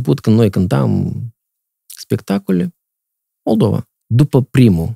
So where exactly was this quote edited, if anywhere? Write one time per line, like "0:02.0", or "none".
0:04.0